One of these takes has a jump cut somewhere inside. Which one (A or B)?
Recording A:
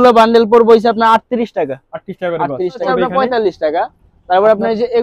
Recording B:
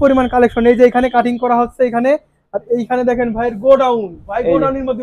A